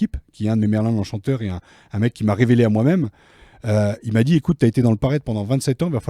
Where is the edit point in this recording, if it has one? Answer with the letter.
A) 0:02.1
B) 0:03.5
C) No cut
C